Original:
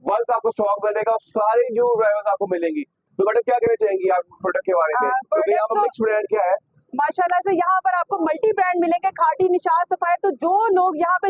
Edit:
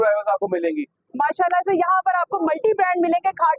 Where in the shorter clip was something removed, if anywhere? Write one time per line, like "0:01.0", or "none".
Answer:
0:01.0

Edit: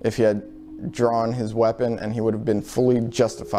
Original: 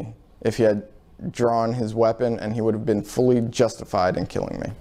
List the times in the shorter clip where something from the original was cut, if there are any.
none

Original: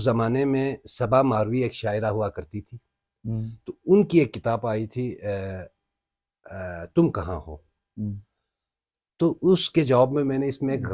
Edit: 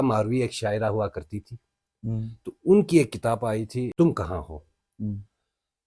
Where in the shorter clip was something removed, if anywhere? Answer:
0:03.9

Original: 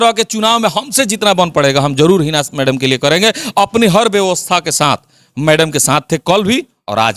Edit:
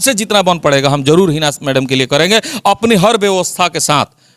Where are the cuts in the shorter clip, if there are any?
none

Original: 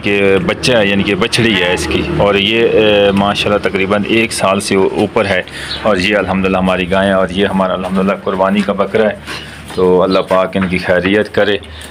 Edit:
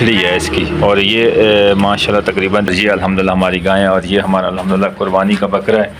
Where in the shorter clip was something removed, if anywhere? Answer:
0:02.7

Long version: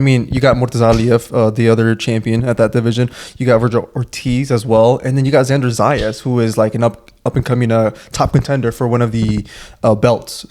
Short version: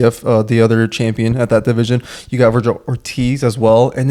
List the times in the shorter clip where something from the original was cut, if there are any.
none

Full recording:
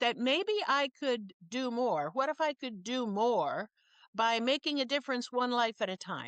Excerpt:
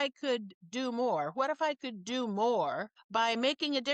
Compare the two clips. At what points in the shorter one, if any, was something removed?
0:02.9

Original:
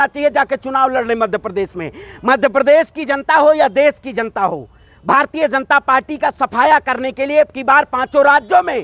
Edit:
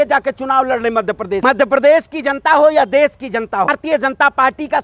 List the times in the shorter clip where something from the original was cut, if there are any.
0:01.4
0:03.7

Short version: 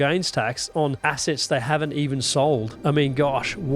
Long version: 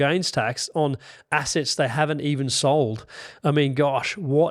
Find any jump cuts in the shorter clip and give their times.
0:01.0
0:02.7

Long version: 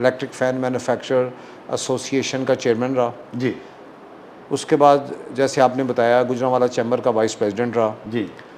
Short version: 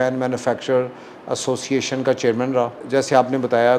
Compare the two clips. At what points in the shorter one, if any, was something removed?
0:02.8

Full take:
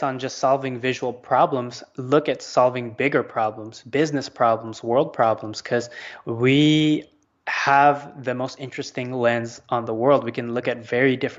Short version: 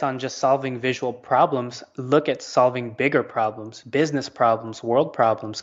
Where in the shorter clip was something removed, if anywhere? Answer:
none

